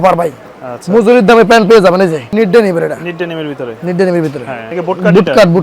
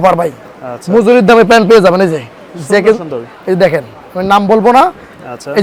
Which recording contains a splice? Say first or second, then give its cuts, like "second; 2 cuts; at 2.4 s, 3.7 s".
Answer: first; 2 cuts; at 2.3 s, 4.6 s